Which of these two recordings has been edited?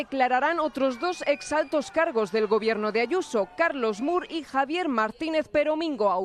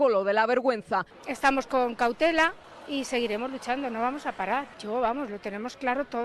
second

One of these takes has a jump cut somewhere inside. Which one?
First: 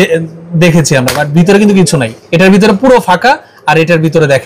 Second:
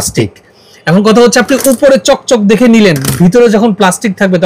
first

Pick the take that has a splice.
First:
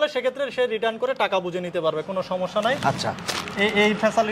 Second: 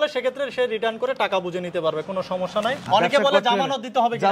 second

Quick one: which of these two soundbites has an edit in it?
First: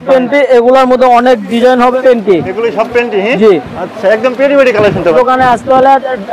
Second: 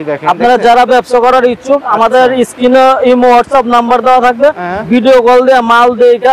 first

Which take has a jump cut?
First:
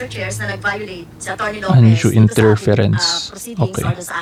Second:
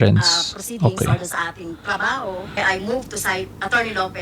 second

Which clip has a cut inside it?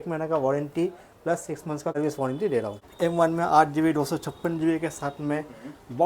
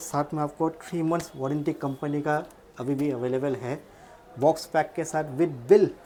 first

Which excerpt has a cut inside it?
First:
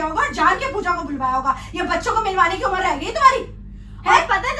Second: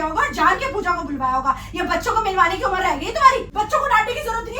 second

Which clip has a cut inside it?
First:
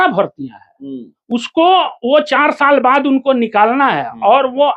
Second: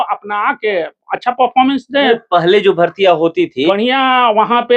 second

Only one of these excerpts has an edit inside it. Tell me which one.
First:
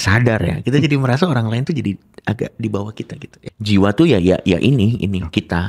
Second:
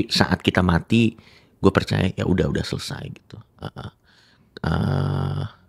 first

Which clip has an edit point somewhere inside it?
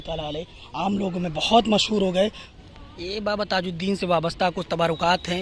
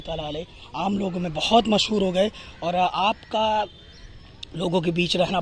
first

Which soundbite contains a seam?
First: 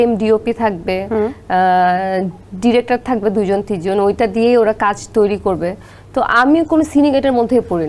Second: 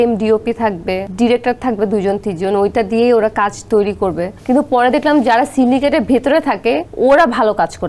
second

